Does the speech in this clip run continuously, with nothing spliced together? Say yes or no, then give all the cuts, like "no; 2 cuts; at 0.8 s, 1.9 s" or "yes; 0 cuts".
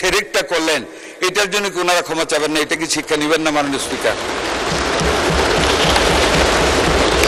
yes; 0 cuts